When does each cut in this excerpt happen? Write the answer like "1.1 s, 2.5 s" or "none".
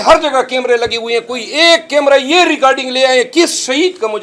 none